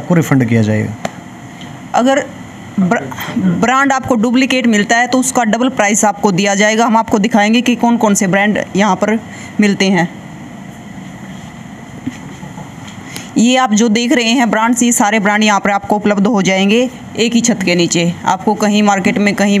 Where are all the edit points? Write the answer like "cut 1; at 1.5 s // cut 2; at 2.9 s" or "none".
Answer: none

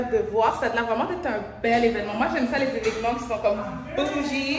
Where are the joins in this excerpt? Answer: none

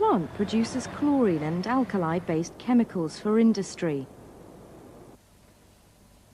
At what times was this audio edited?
cut 1; at 5.2 s

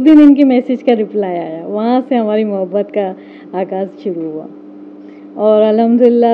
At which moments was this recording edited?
none

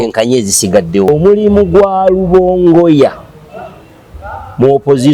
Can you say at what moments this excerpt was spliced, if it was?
cut 1; at 1.1 s

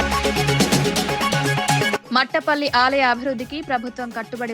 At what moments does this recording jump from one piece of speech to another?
cut 1; at 2.0 s

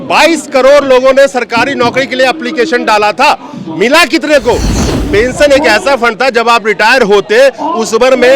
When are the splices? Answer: cut 1; at 4.8 s

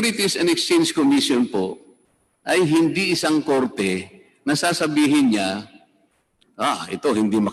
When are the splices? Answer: none

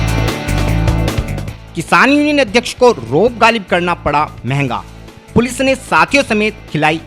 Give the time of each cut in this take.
none

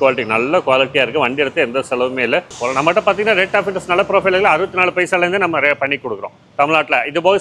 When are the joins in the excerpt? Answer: cut 1; at 2.5 s

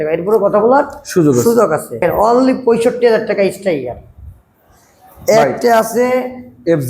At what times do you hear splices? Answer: cut 1; at 2.0 s

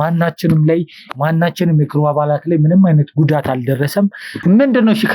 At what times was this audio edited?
cut 1; at 4.3 s

